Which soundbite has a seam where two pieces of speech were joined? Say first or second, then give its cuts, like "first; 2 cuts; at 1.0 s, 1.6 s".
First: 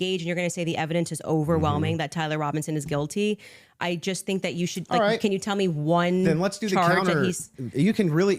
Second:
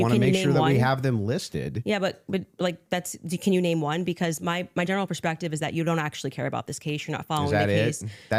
first; 1 cut; at 1.2 s